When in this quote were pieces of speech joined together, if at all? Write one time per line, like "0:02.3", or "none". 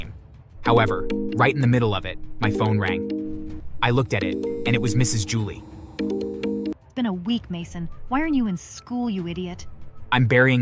0:06.8